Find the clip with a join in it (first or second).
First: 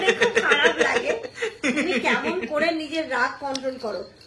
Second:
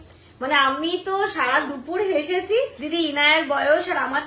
second